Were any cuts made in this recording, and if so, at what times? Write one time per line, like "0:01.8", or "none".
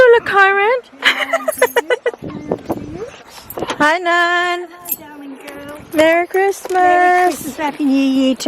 0:03.4